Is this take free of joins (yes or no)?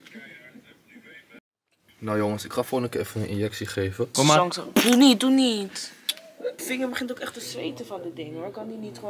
no